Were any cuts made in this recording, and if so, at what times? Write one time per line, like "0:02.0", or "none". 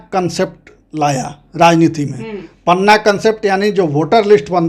none

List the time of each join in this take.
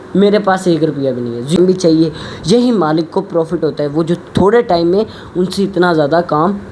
0:01.6

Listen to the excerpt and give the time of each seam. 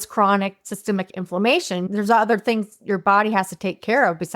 0:01.8

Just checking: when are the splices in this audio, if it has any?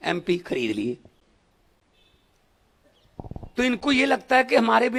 none

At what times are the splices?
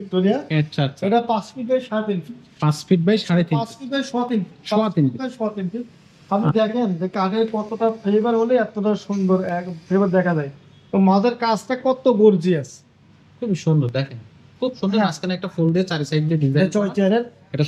none

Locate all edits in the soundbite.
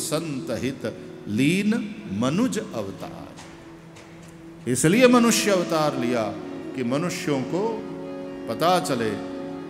none

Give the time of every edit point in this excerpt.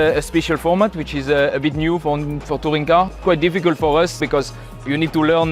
0:03.1
0:04.2

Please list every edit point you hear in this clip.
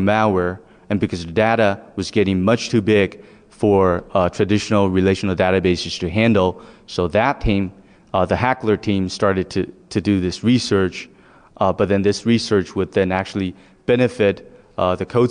0:09.3

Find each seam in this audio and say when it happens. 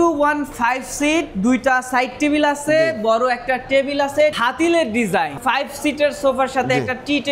0:04.4
0:05.4

